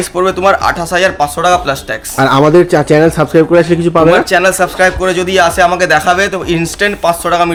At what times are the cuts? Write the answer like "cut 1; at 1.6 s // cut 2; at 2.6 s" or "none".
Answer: none